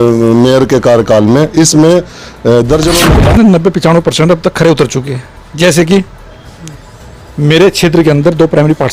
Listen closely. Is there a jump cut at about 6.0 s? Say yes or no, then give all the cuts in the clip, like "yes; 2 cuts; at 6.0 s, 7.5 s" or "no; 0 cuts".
no; 1 cut; at 3.0 s